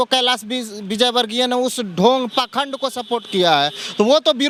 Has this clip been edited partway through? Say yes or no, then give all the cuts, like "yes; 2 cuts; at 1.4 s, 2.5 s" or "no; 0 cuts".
no; 0 cuts